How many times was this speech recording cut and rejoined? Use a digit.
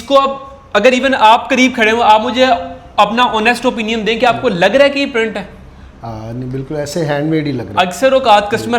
0